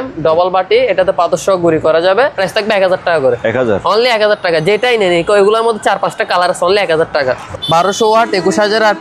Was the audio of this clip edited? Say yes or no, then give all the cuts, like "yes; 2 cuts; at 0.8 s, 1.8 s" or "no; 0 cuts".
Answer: yes; 2 cuts; at 2.4 s, 7.4 s